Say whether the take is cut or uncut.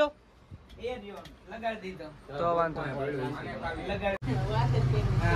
cut